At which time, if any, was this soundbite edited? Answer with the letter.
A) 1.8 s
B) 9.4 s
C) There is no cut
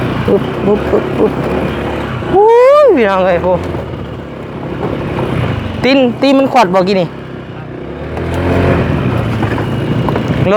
C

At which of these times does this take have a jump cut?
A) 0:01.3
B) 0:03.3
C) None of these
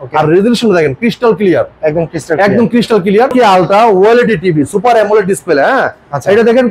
B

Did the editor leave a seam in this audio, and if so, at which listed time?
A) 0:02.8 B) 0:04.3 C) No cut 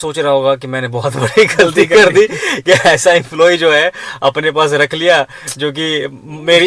C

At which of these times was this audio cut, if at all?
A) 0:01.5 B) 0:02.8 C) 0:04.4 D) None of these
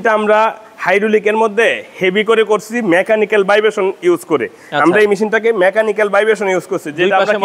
D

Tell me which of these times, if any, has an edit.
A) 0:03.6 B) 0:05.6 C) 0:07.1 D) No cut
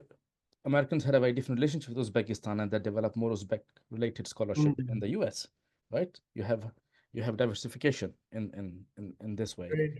D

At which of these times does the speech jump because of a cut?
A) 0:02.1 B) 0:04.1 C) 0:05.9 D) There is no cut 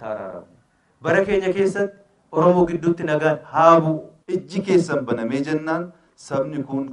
B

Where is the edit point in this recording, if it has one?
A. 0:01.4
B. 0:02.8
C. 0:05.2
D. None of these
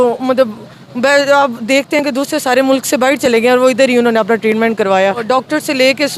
C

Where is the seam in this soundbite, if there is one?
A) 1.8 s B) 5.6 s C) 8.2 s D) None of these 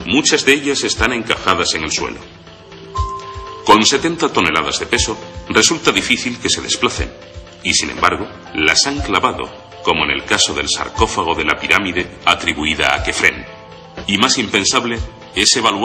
C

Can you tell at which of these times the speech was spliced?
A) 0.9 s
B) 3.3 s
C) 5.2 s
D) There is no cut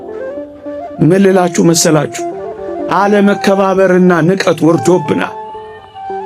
A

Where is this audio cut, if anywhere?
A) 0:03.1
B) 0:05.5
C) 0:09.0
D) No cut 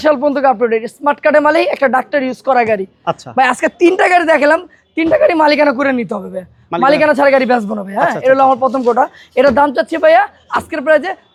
D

